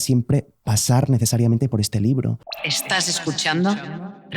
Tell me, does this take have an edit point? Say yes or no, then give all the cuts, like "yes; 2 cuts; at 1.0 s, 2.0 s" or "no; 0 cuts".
yes; 1 cut; at 2.4 s